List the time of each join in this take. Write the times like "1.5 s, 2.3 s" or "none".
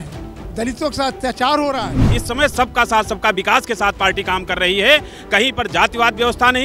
2.1 s

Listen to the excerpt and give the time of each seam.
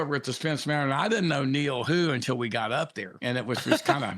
3.1 s

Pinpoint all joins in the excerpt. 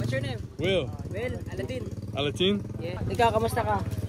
none

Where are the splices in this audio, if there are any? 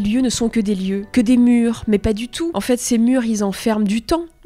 1.1 s, 2.5 s

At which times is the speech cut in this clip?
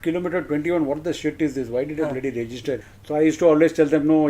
2.9 s

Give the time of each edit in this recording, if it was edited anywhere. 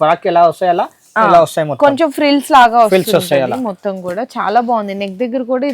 none

